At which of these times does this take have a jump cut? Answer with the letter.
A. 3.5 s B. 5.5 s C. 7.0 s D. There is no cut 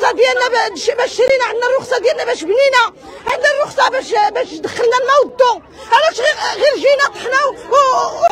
D